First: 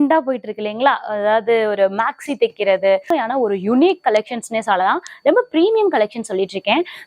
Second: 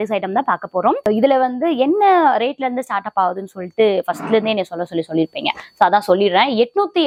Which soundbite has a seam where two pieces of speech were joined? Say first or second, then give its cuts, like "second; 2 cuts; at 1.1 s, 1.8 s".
first; 1 cut; at 3.1 s